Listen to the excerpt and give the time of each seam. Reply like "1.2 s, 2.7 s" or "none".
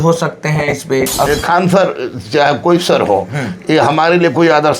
1.3 s